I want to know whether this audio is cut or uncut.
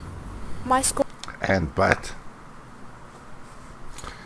uncut